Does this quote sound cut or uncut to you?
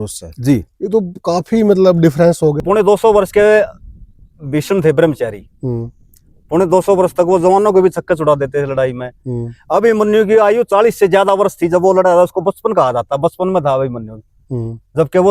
cut